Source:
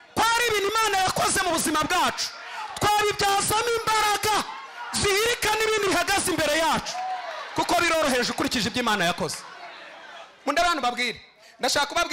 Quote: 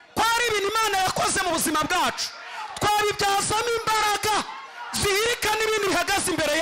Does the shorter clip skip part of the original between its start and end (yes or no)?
no